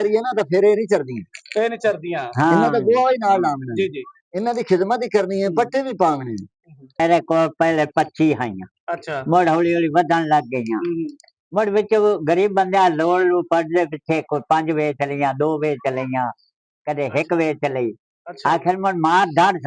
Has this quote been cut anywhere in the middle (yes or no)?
yes